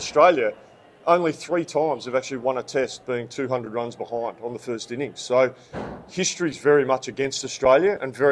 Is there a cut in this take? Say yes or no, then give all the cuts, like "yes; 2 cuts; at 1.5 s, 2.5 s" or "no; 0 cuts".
no; 0 cuts